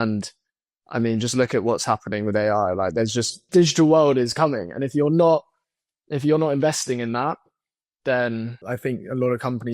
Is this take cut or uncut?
cut